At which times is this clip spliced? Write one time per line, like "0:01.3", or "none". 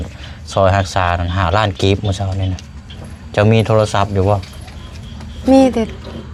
none